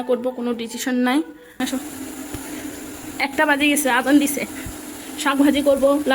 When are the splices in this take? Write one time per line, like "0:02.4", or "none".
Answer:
0:01.4